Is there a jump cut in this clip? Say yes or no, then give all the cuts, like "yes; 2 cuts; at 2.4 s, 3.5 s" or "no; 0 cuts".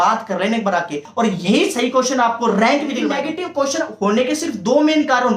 yes; 2 cuts; at 1.1 s, 3.1 s